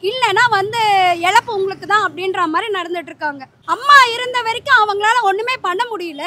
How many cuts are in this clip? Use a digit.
1